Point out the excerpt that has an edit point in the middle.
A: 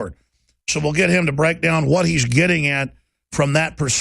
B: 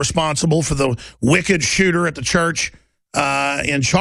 A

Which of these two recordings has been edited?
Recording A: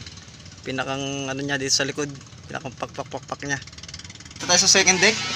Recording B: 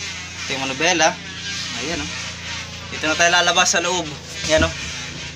A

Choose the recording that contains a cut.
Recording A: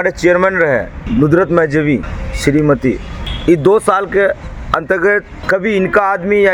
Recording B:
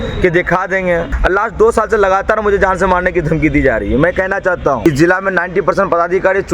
B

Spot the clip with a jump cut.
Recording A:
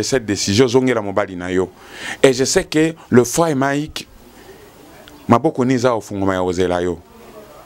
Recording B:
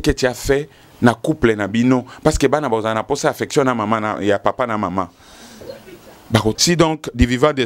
B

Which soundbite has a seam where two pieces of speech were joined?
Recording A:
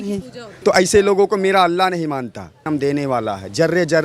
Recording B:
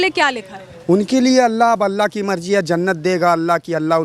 A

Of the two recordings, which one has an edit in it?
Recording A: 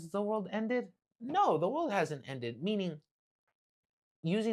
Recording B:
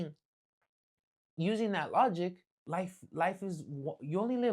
B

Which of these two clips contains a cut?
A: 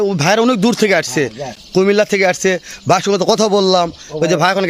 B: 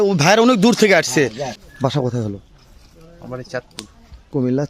B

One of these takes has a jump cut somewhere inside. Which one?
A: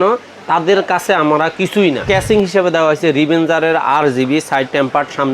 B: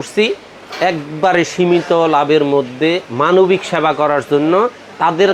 A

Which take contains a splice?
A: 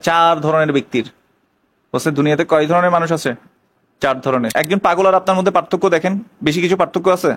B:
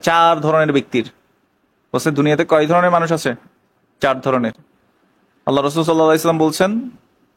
A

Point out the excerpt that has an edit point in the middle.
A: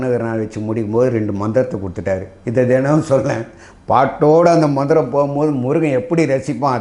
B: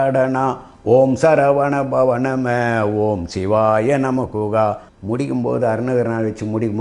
B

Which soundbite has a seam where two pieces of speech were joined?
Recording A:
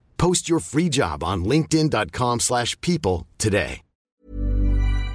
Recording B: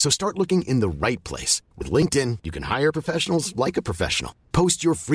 A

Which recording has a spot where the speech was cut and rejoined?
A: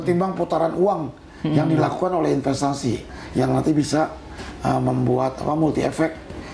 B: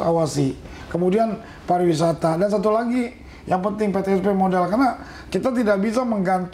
A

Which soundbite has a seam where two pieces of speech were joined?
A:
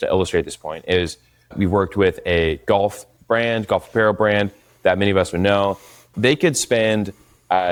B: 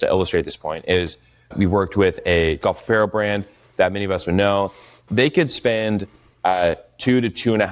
B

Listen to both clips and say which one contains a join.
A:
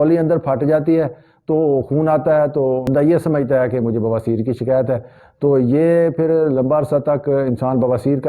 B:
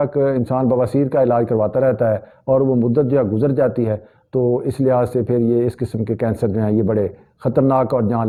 A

